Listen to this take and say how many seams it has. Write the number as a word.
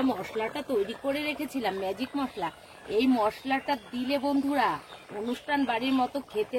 zero